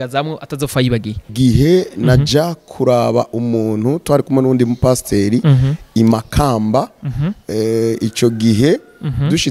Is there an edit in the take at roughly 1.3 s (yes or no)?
yes